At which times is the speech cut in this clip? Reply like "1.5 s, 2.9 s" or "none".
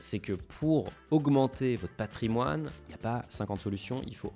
1.0 s, 2.8 s

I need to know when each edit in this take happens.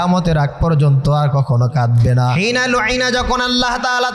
2.3 s

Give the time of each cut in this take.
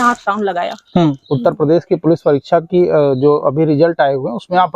1.2 s

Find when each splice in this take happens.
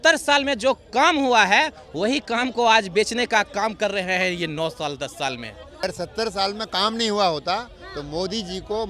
5.8 s

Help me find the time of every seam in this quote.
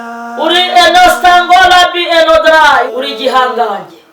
2.9 s

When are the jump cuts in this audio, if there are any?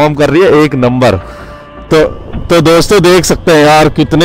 none

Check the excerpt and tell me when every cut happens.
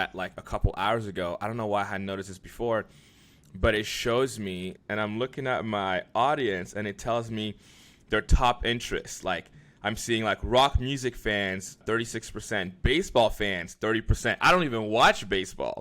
4.7 s, 11.8 s

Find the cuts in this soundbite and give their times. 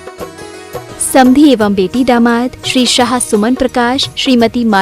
1.1 s

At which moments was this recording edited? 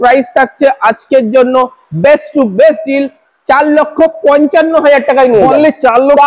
none

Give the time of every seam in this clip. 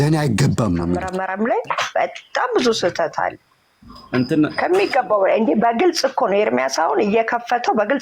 1.0 s

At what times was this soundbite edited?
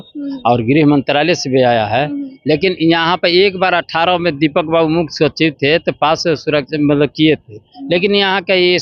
none

